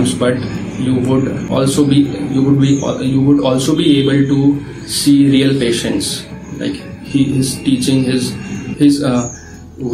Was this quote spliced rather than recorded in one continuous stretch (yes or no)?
yes